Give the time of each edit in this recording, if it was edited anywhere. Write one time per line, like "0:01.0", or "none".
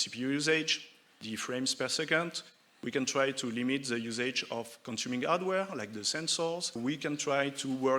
0:06.8